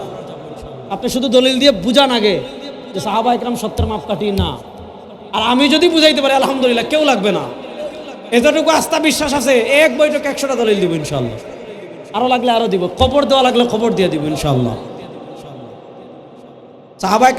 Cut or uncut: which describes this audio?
uncut